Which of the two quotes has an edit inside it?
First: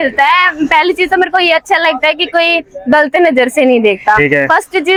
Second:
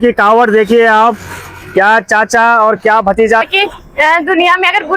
second; 1 cut; at 3.5 s

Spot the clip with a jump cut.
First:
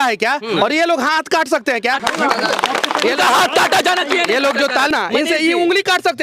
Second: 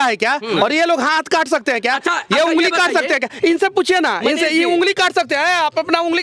first; 2 cuts; at 2.0 s, 4.9 s

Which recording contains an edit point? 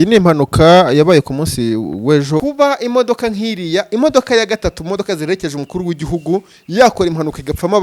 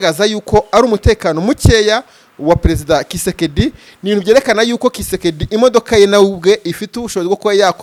first; 1 cut; at 2.4 s

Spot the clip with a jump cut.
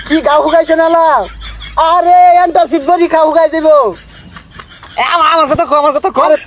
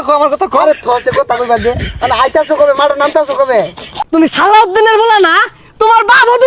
second; 1 cut; at 3.8 s

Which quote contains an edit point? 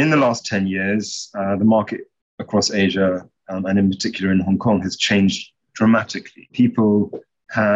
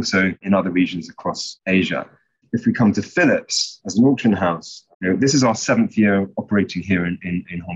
second; 1 cut; at 2.4 s

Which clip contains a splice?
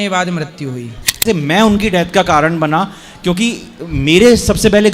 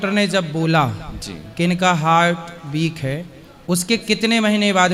first; 1 cut; at 1.2 s

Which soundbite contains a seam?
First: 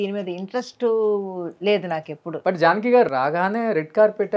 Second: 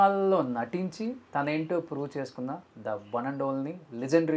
first; 1 cut; at 2.3 s

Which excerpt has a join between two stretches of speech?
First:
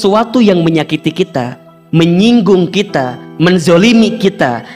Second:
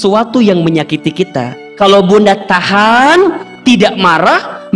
second; 1 cut; at 1.6 s

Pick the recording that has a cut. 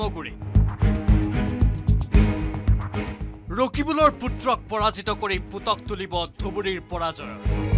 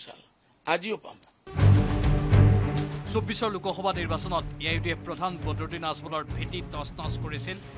second; 1 cut; at 0.9 s

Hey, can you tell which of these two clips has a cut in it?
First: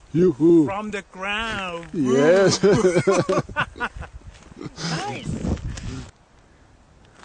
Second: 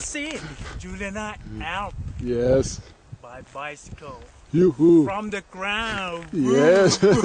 first; 1 cut; at 6.1 s

